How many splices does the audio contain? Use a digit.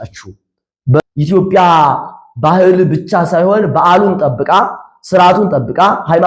1